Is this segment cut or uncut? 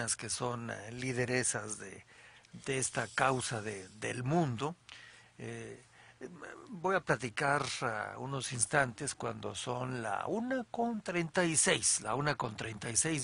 cut